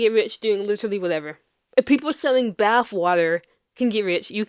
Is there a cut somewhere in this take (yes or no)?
yes